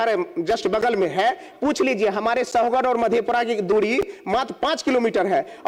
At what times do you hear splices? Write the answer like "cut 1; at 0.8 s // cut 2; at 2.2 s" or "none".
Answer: none